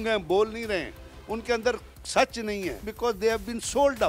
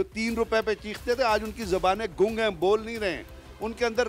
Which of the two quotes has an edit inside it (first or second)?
first